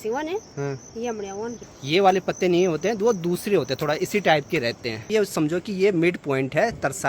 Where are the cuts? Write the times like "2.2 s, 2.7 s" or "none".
1.7 s, 5.1 s